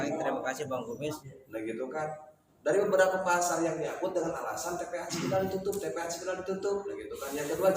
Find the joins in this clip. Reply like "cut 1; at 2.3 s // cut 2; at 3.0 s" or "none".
cut 1; at 1.3 s